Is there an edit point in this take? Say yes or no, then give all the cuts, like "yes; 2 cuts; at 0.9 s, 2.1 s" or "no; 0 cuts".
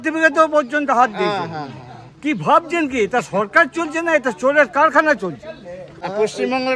yes; 1 cut; at 5.9 s